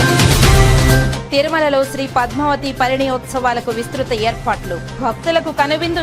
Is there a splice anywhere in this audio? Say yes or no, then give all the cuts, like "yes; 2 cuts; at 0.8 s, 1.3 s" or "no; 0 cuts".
yes; 1 cut; at 1.2 s